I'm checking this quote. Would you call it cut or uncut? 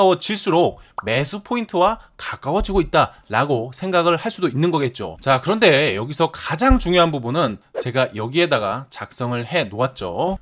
cut